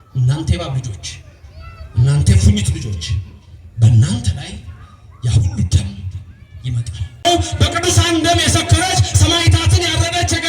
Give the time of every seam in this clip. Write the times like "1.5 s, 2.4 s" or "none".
7.2 s